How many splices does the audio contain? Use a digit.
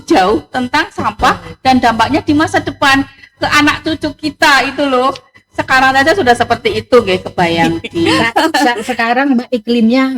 1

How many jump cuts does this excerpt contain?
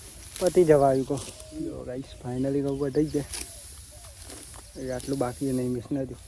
0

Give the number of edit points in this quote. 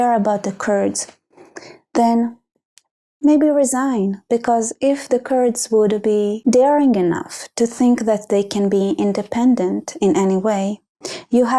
1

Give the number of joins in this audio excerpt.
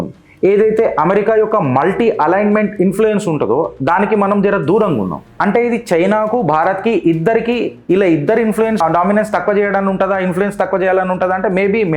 1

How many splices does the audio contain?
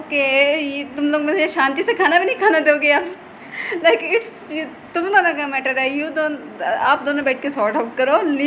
0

